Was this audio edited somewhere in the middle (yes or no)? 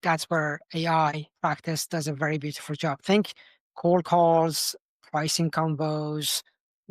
yes